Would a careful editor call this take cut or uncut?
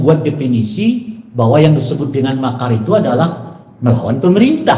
uncut